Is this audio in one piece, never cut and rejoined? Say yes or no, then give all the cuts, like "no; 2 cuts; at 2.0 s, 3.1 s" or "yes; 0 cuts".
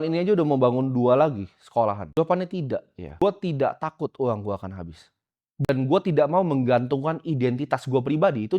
no; 3 cuts; at 2.0 s, 3.0 s, 5.7 s